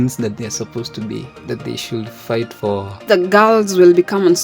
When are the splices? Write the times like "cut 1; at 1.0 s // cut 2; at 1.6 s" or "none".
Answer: cut 1; at 3.0 s